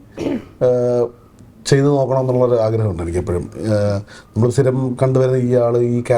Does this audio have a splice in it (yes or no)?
no